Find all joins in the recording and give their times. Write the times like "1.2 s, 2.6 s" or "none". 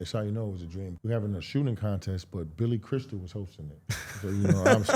0.9 s